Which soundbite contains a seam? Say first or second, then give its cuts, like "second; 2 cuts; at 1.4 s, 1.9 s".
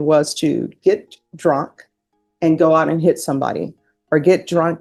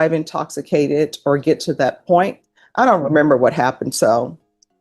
second; 1 cut; at 2.4 s